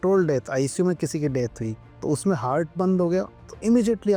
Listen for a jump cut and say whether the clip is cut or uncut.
uncut